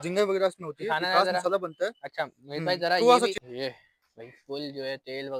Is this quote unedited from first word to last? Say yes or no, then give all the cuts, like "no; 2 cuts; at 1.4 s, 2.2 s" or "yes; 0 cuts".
no; 1 cut; at 3.3 s